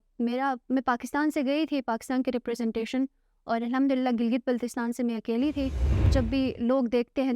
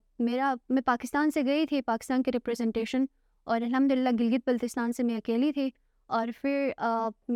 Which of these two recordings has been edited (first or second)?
first